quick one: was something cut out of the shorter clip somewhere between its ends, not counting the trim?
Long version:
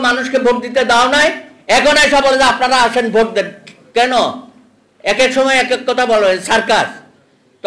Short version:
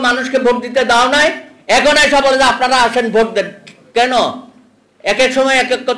no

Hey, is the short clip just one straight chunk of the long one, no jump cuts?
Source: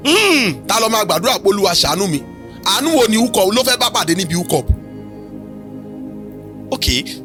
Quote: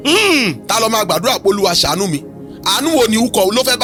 yes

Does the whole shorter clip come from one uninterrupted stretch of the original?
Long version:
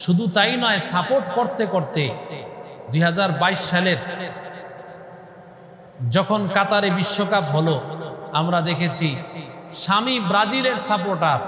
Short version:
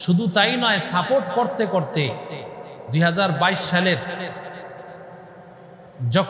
yes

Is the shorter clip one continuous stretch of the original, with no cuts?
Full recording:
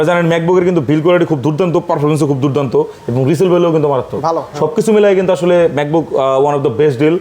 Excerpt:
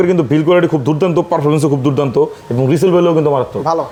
yes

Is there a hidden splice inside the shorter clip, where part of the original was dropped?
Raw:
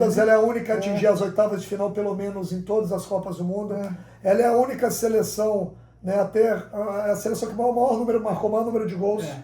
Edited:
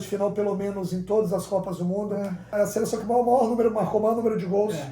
yes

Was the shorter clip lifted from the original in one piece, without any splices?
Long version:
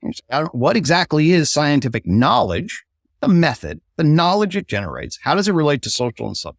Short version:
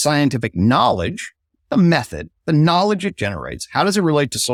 yes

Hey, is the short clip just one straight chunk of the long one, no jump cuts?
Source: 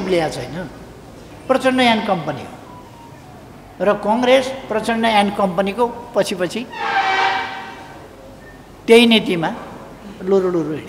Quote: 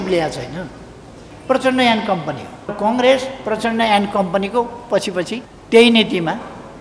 no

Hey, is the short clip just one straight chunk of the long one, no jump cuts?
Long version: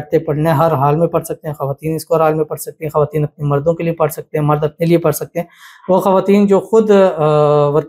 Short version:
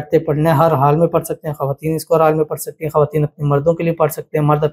yes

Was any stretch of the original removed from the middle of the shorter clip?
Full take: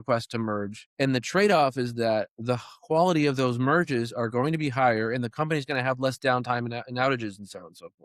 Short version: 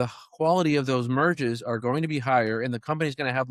no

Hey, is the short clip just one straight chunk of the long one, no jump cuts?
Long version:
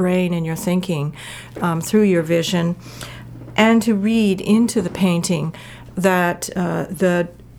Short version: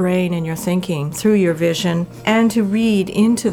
no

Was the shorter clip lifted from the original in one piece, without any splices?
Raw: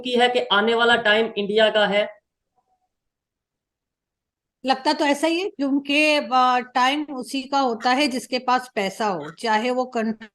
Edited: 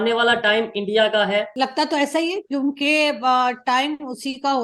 no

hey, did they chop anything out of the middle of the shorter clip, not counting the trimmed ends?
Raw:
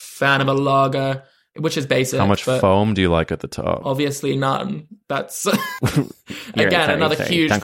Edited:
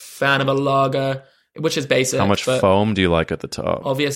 no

